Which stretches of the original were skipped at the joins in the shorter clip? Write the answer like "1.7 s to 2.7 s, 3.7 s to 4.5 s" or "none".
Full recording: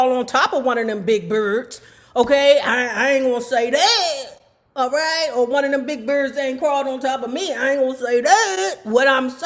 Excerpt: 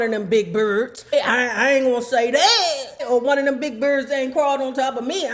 1.9 s to 2.5 s, 4.4 s to 5.3 s